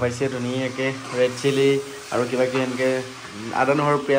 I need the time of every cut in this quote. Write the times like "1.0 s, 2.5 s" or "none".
none